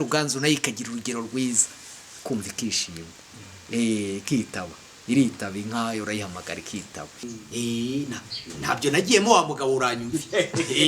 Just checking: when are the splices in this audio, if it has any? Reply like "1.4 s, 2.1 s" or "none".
7.2 s